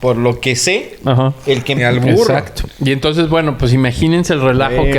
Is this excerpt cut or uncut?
cut